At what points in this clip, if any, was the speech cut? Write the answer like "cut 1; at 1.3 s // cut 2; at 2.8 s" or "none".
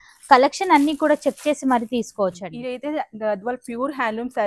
cut 1; at 2.5 s